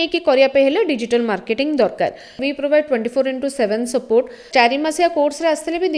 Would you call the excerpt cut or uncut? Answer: cut